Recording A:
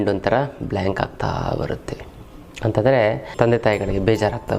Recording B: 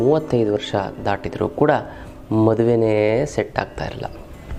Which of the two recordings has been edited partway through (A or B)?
A